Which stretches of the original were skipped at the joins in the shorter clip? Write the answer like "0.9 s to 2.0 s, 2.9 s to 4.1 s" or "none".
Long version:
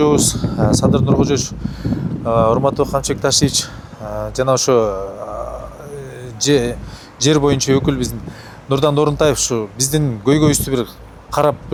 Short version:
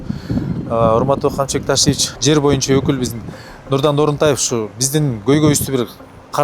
3.6 s to 7.1 s